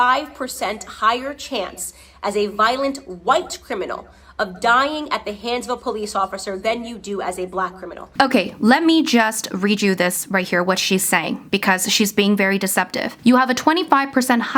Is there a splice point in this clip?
no; 0 cuts

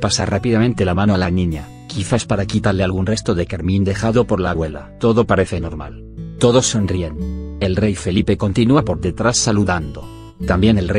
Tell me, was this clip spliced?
no; 0 cuts

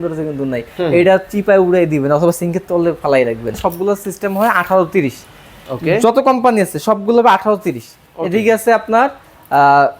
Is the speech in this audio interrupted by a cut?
yes; 1 cut; at 3.5 s

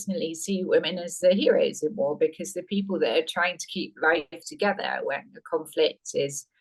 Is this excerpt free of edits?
yes; 0 cuts

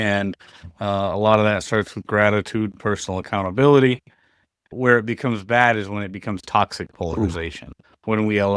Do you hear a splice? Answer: yes; 1 cut; at 4.6 s

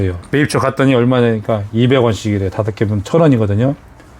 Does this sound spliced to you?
no; 0 cuts

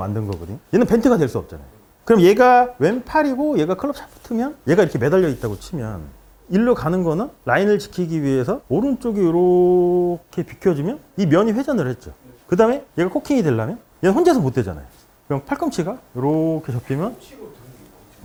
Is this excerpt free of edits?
yes; 0 cuts

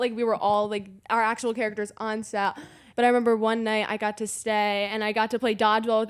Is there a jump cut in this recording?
yes; 1 cut; at 2.8 s

